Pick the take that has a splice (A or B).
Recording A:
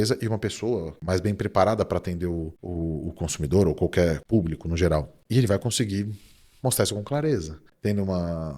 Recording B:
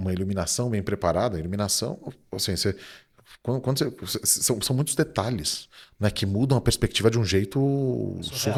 A